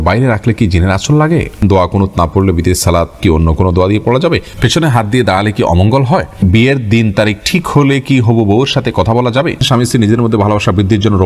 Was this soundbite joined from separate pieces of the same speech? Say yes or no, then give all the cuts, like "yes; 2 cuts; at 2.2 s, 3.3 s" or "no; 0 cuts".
yes; 5 cuts; at 1.6 s, 3.1 s, 4.5 s, 6.4 s, 9.6 s